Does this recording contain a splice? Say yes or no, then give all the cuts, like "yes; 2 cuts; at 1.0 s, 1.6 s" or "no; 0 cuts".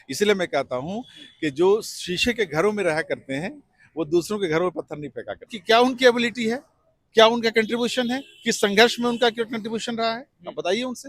yes; 1 cut; at 5.5 s